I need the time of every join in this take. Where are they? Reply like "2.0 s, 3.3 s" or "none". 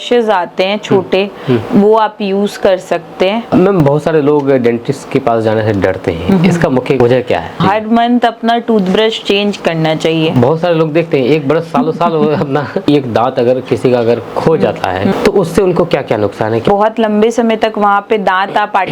3.5 s, 7.4 s, 12.9 s, 15.1 s, 16.6 s